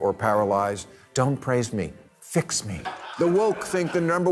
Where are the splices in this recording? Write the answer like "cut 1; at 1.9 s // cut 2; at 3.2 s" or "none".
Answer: cut 1; at 2.8 s